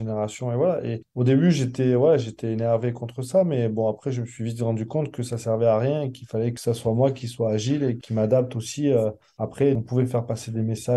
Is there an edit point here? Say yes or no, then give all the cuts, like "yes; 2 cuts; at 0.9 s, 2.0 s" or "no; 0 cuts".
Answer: no; 0 cuts